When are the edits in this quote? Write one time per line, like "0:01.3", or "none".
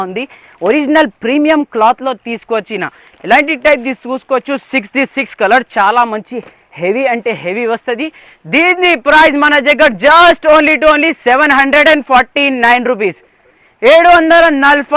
none